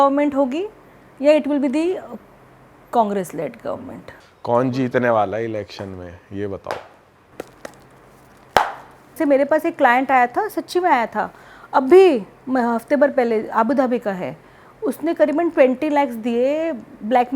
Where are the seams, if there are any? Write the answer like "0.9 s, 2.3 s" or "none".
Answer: 9.1 s